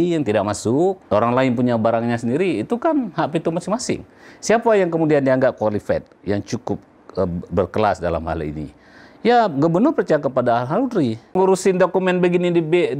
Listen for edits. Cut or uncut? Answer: cut